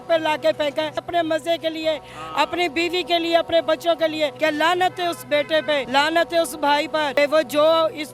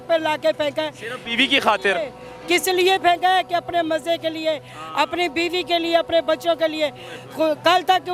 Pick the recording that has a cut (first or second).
first